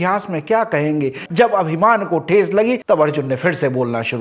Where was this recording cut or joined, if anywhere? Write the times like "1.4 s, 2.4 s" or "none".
1.2 s